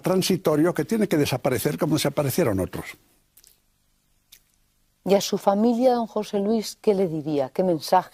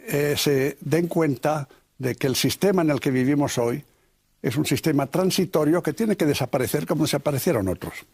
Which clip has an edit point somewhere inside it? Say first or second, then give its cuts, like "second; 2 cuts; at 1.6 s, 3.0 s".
second; 1 cut; at 1.7 s